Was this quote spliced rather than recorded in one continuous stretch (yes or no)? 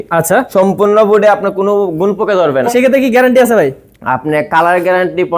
yes